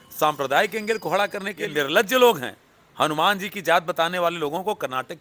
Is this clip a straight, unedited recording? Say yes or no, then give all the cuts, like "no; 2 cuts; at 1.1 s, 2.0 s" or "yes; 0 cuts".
no; 1 cut; at 1.7 s